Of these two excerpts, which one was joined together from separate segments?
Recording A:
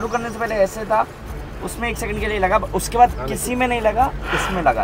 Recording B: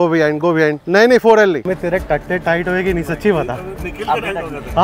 B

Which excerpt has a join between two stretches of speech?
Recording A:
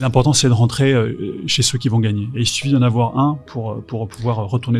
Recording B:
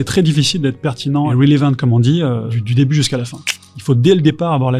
B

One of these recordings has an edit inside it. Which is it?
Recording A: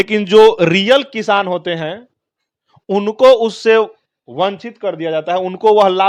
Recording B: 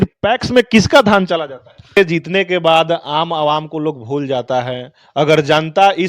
B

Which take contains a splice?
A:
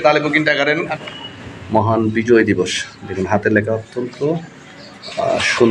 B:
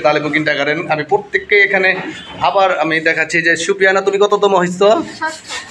A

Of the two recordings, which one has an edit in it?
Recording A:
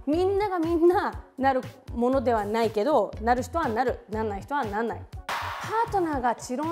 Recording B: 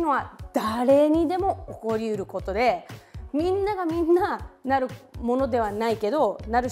A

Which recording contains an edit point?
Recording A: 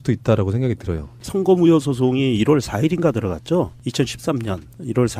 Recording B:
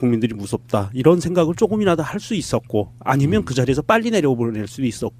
A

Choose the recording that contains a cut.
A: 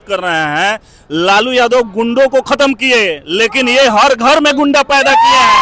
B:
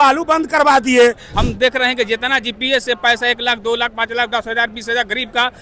B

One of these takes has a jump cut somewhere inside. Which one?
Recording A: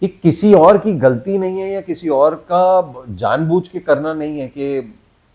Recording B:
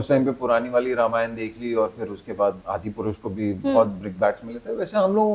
B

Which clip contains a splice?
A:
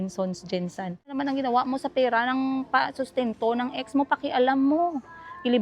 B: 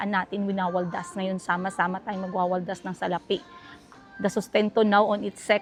A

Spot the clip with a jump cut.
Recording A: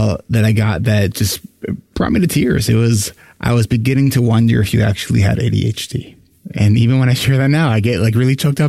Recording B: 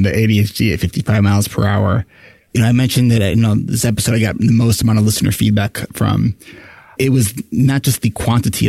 B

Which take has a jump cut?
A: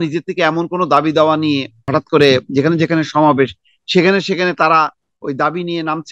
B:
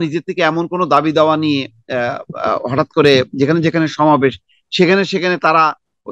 A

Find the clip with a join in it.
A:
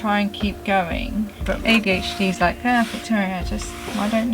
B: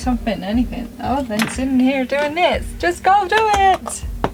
A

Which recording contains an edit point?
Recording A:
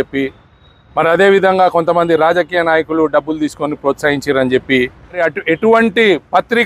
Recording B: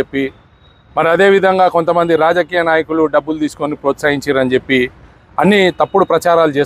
A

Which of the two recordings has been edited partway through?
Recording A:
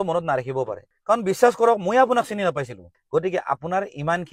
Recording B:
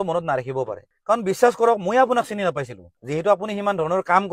A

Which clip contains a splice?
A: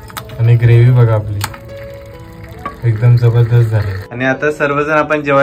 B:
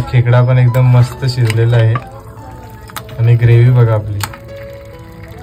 A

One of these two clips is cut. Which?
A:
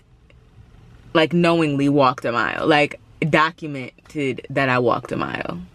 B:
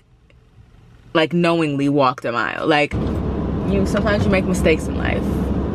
B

